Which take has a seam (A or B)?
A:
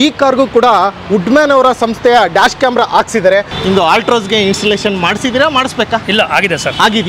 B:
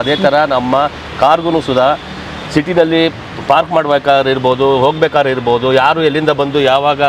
A